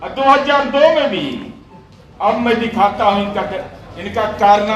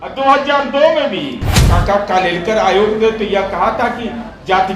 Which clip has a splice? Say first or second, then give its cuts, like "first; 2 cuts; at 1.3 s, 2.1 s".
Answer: second; 1 cut; at 1.6 s